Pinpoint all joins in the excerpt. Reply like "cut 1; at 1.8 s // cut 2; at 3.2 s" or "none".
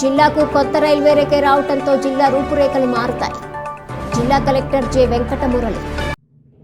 none

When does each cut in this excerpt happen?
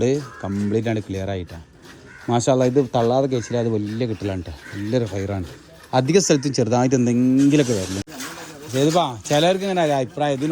cut 1; at 8.0 s

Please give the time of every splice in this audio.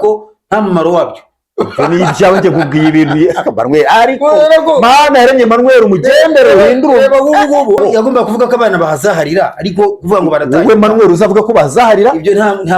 cut 1; at 7.8 s

